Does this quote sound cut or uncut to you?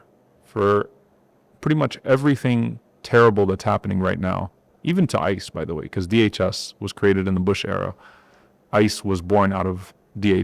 uncut